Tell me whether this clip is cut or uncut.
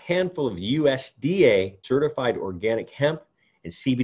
cut